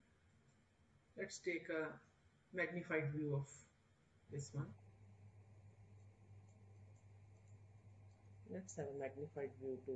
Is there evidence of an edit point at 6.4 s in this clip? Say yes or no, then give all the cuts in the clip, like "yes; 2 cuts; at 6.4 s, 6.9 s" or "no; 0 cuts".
no; 1 cut; at 4.7 s